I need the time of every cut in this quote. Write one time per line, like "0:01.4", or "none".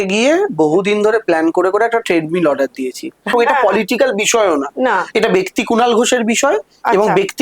0:03.3